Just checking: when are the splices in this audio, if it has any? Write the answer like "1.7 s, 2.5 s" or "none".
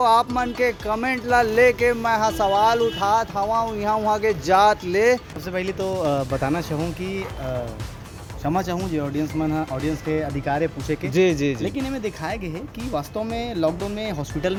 none

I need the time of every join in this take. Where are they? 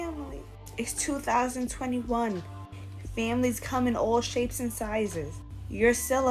5.3 s

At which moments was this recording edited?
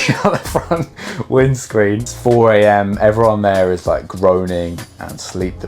2.1 s

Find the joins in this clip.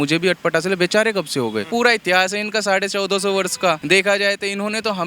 1.7 s, 3.8 s

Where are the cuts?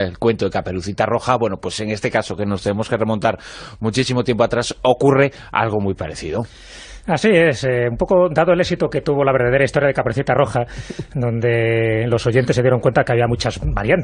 11.4 s

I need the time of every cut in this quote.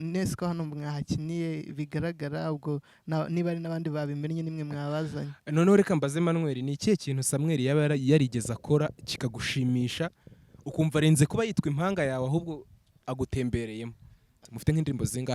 14.4 s

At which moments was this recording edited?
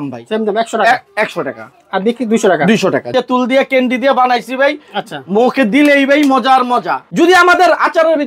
3.1 s, 7.0 s

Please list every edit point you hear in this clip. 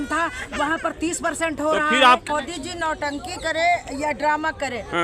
2.2 s

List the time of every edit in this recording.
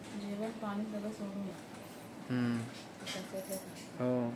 1.6 s

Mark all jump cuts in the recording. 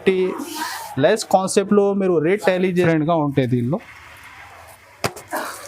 2.9 s

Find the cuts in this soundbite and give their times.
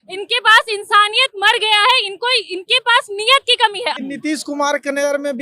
3.9 s

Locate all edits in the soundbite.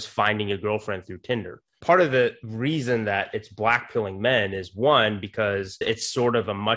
1.7 s, 2.4 s, 5.8 s

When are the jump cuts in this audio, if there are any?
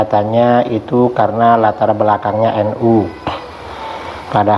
none

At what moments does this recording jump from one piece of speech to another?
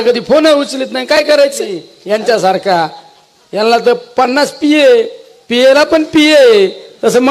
1.9 s

